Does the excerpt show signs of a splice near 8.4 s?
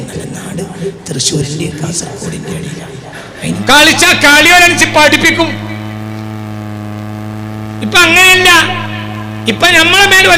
no; 1 cut; at 3.6 s

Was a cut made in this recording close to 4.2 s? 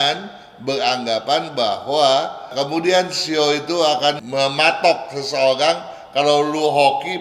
yes; 2 cuts; at 2.4 s, 4.2 s

